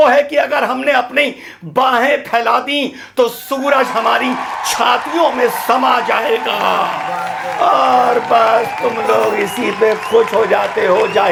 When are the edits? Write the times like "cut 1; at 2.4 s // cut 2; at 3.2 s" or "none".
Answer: none